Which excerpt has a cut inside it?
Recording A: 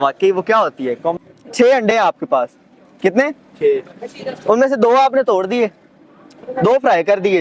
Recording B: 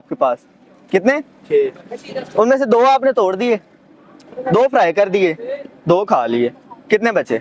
A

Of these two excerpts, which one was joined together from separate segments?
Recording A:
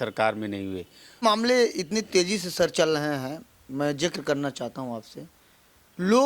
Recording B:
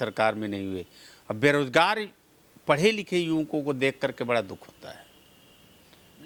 A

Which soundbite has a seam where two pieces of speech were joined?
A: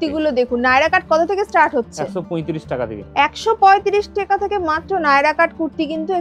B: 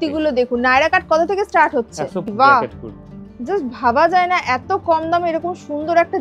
B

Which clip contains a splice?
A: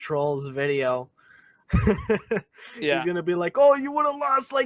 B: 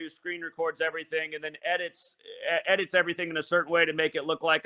B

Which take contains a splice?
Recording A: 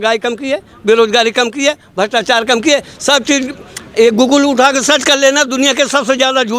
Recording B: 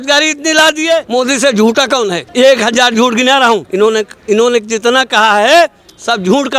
B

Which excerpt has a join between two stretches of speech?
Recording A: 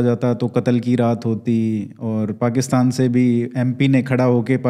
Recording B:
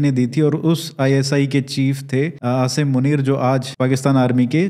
B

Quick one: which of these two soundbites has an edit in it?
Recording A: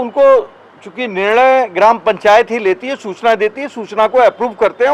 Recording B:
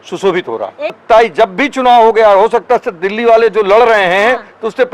B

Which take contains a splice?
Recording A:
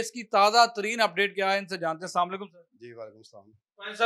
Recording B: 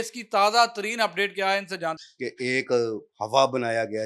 B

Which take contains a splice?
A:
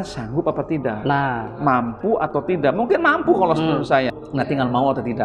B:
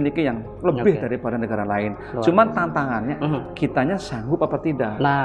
A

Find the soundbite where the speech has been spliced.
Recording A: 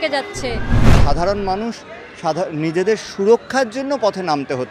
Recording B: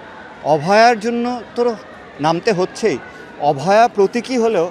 A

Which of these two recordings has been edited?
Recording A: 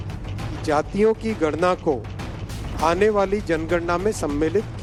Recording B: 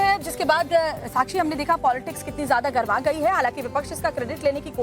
B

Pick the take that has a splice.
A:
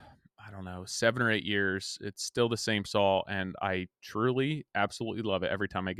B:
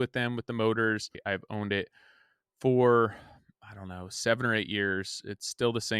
B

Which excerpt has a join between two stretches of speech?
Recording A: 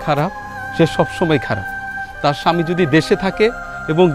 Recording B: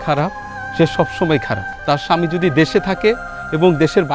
B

